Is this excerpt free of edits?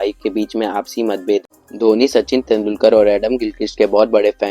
no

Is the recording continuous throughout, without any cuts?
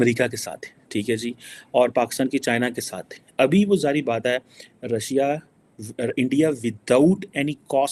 yes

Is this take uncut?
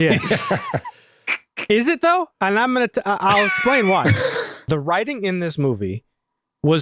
no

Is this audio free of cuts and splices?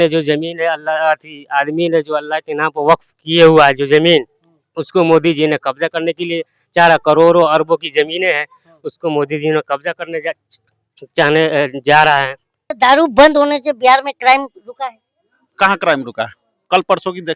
no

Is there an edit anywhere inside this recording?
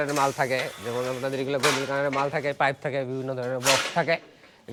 no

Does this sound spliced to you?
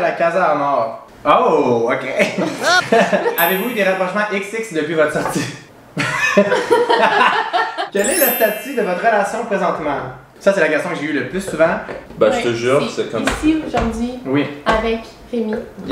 yes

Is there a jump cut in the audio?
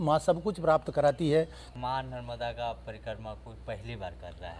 yes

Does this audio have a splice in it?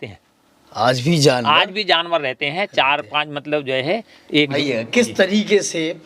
yes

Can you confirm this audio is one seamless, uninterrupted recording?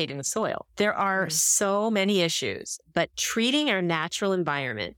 no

